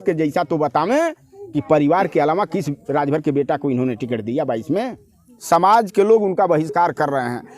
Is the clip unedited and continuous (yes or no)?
no